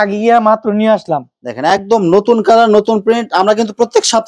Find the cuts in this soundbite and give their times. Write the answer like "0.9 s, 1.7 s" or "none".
none